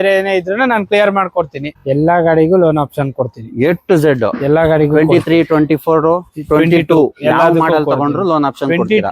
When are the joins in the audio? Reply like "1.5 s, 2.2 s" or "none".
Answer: 1.7 s